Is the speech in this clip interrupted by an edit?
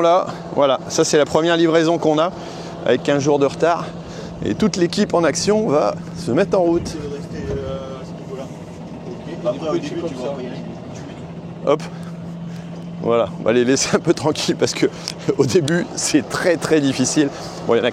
no; 0 cuts

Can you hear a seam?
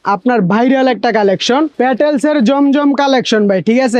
yes; 1 cut; at 1.7 s

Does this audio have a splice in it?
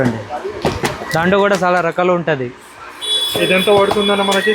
no; 0 cuts

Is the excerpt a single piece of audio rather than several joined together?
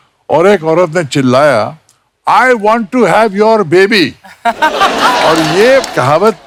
yes; 0 cuts

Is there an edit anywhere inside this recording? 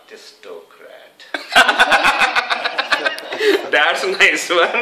no; 0 cuts

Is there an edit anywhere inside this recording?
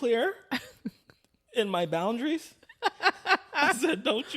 no; 0 cuts

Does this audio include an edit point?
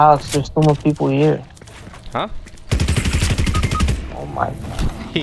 no; 0 cuts

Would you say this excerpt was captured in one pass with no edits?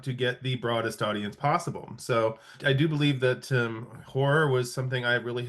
yes; 0 cuts

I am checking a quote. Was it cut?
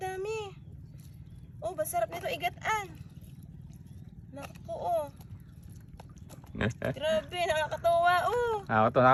no; 0 cuts

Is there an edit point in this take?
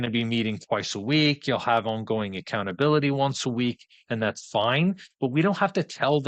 no; 0 cuts

